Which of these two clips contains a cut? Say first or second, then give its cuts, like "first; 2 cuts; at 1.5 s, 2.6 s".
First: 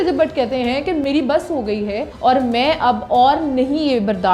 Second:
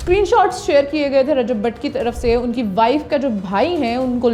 first; 2 cuts; at 1.0 s, 2.1 s